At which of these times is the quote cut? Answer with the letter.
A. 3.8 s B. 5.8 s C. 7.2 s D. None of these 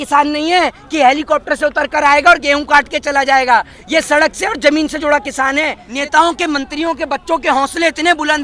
B